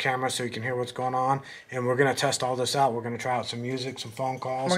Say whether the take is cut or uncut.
uncut